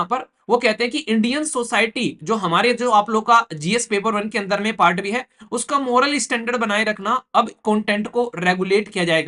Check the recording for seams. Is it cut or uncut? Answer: uncut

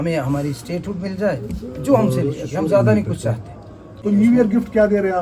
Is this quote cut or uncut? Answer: cut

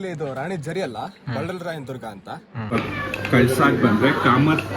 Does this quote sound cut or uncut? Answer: cut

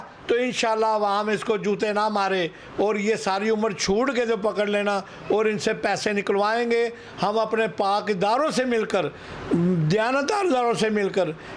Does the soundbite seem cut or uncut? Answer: uncut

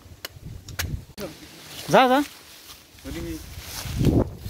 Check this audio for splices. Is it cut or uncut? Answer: cut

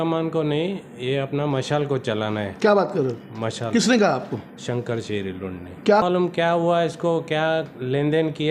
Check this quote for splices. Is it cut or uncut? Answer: cut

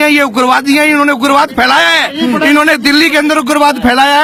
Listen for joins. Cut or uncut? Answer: uncut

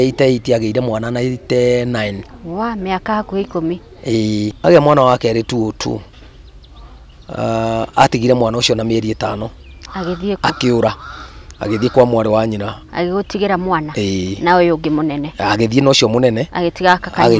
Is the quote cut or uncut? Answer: cut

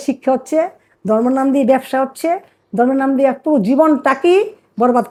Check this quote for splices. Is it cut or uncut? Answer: uncut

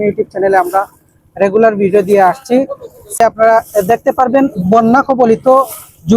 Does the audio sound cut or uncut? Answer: cut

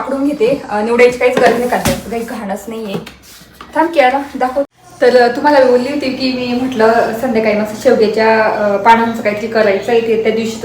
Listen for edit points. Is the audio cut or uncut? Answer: cut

